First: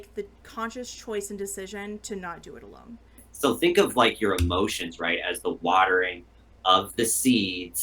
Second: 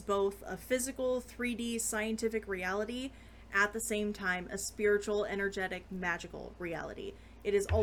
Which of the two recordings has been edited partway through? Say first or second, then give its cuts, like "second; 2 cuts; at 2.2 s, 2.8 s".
first; 1 cut; at 3.3 s